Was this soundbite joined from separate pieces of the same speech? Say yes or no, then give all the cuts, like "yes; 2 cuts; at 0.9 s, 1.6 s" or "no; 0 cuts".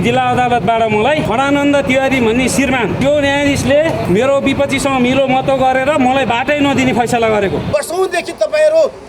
yes; 4 cuts; at 1.2 s, 3.0 s, 4.0 s, 7.6 s